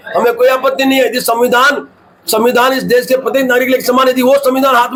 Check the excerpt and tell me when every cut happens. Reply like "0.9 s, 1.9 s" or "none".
none